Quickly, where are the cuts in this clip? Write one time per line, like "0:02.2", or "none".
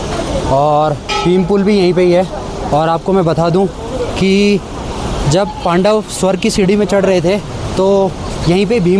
none